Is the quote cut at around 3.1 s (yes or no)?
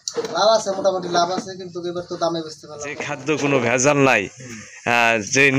yes